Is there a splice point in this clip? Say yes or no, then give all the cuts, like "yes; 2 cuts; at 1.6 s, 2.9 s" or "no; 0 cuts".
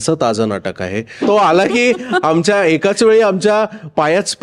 yes; 1 cut; at 1.2 s